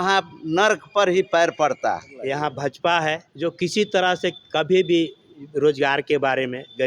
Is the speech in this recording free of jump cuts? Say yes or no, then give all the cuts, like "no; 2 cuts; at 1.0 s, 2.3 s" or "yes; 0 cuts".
no; 2 cuts; at 2.1 s, 3.3 s